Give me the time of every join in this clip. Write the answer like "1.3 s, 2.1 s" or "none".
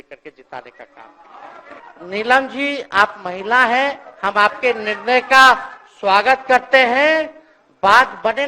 1.9 s